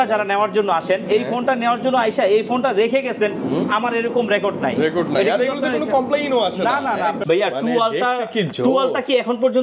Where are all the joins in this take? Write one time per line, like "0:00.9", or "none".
0:07.2